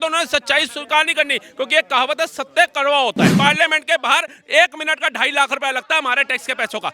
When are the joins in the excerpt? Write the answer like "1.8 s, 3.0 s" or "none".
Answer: 3.3 s